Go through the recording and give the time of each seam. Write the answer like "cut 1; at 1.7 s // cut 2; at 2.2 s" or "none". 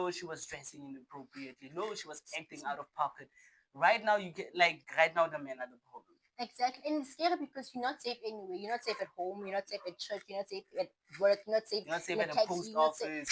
none